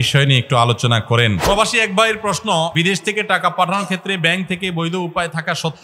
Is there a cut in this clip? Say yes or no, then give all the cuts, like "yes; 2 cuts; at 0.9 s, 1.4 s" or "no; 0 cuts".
yes; 2 cuts; at 1.4 s, 2.7 s